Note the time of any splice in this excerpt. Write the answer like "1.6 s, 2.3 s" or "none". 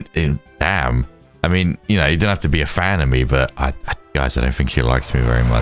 none